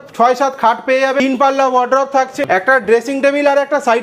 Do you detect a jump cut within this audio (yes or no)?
yes